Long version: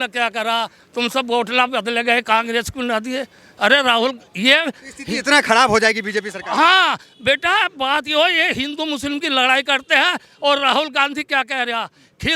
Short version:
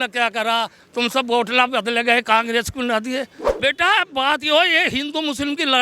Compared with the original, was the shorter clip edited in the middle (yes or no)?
yes